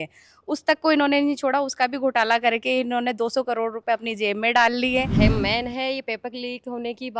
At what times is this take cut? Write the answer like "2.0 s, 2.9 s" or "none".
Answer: 5.1 s